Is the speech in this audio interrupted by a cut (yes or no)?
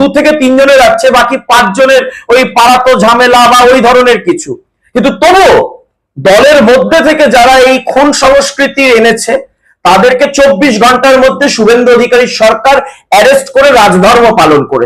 no